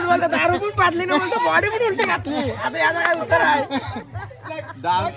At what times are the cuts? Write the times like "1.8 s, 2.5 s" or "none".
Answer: none